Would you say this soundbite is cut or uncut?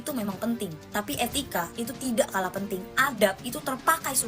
uncut